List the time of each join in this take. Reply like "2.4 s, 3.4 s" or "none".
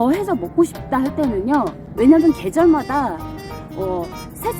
1.8 s